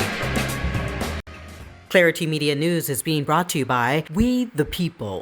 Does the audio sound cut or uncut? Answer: cut